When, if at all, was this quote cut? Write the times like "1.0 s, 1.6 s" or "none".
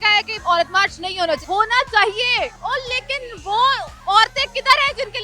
1.4 s, 2.6 s, 3.9 s